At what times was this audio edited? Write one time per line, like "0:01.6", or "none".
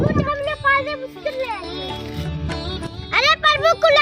0:02.2